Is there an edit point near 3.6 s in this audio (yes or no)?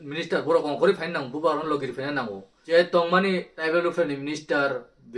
yes